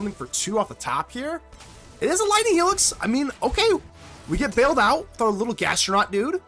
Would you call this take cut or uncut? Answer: uncut